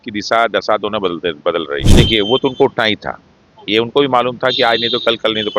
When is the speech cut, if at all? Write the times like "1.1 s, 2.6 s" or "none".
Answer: 1.9 s